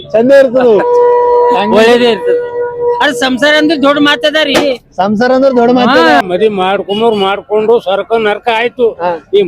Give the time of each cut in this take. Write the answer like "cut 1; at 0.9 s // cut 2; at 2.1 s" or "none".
cut 1; at 6.2 s